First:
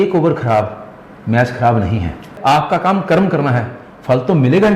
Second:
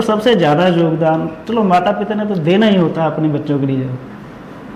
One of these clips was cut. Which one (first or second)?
first